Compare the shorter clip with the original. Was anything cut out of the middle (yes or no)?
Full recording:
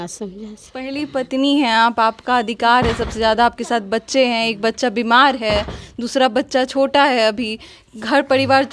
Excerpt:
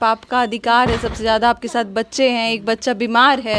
no